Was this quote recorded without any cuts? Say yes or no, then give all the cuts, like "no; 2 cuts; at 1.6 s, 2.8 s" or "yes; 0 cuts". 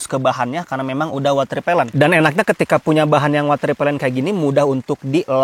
yes; 0 cuts